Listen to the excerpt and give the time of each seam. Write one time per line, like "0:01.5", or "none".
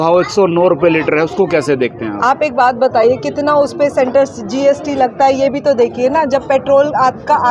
none